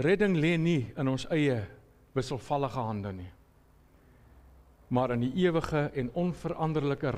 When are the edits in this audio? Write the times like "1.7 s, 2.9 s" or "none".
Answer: none